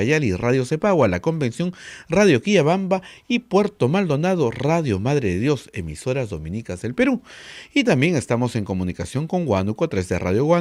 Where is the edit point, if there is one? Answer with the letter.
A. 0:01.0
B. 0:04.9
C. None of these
C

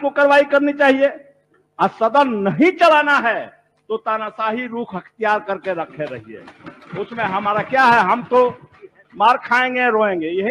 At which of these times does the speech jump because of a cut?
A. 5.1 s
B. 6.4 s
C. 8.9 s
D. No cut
D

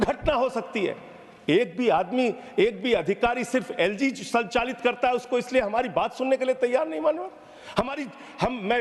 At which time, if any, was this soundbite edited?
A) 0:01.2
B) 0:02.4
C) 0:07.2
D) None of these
D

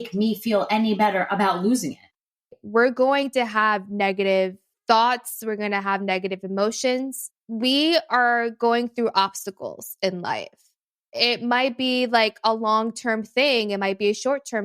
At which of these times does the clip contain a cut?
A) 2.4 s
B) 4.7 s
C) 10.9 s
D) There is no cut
A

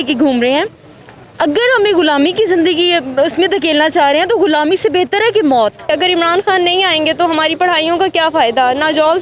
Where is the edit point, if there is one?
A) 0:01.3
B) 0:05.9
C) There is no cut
B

